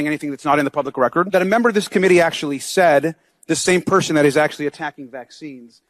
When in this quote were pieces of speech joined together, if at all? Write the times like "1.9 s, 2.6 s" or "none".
1.3 s